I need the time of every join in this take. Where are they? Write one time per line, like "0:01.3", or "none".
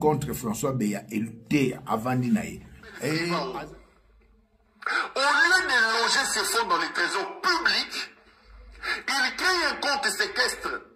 0:03.4